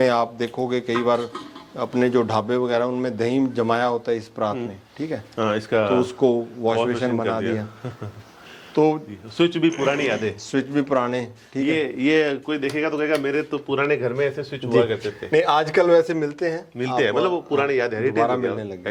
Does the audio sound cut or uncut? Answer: uncut